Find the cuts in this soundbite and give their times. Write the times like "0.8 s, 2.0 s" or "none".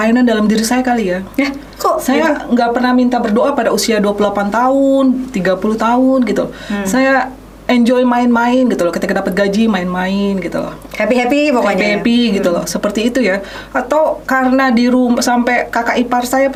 none